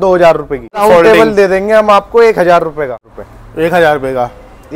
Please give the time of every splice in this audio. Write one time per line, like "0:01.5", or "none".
0:00.8
0:03.0